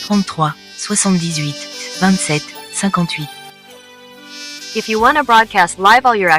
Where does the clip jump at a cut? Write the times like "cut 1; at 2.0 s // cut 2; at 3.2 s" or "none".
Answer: cut 1; at 3.1 s